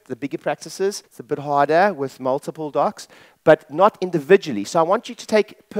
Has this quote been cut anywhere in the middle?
yes; 1 cut; at 1.1 s

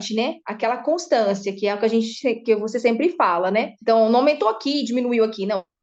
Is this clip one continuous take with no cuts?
yes; 0 cuts

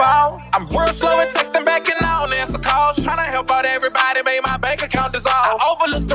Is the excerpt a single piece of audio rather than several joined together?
yes; 0 cuts

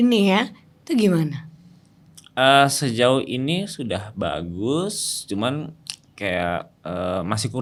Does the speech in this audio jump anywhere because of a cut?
no; 0 cuts

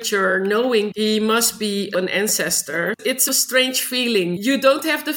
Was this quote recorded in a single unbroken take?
no; 4 cuts; at 0.9 s, 1.9 s, 3.2 s, 4.4 s

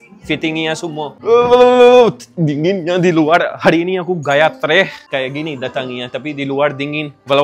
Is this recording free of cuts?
yes; 0 cuts

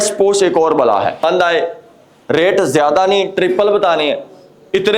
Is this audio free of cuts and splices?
no; 1 cut; at 1.2 s

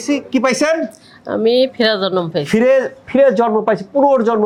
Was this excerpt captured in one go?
yes; 0 cuts

